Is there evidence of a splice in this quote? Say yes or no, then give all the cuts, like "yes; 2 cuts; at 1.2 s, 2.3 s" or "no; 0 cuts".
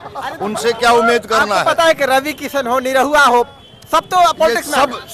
no; 0 cuts